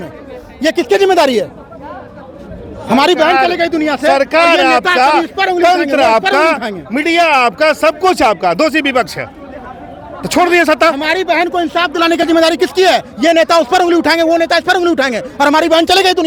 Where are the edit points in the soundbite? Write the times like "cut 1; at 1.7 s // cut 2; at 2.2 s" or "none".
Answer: none